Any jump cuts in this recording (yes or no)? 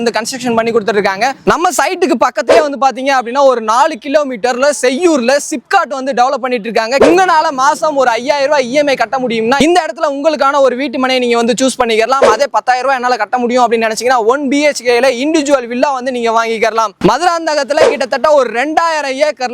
yes